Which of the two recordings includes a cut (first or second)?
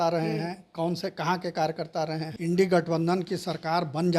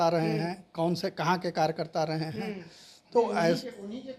first